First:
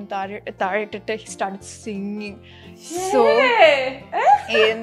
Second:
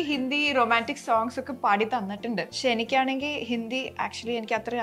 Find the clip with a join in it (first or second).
second